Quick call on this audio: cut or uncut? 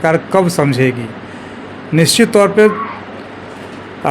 uncut